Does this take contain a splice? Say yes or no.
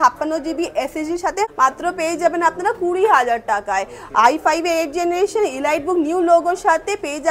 no